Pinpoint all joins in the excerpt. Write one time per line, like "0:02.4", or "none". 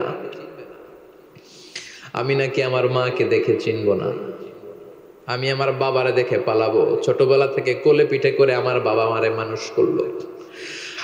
none

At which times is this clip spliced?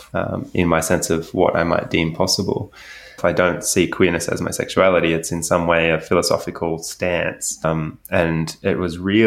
0:03.1

